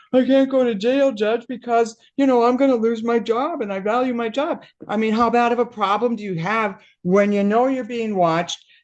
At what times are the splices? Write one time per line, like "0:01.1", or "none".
0:04.7